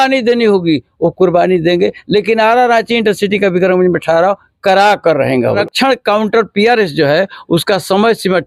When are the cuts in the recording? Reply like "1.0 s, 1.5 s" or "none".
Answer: 5.6 s